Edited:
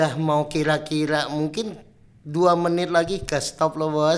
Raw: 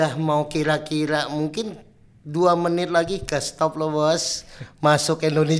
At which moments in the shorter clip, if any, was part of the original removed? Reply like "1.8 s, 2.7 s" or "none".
none